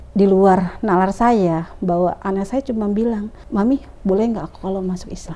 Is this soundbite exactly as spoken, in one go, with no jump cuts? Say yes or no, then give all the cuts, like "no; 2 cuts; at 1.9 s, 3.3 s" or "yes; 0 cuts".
no; 1 cut; at 3.3 s